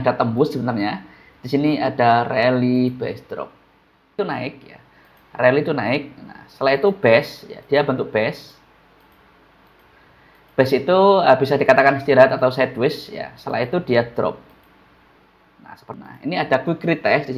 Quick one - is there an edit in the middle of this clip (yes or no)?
yes